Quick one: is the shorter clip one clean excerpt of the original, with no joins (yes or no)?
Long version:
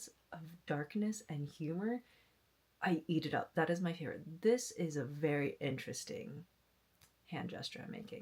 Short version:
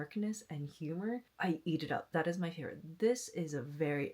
no